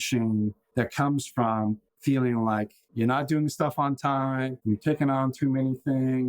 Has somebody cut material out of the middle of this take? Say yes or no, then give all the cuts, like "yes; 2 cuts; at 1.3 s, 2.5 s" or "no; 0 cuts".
yes; 2 cuts; at 1.9 s, 4.6 s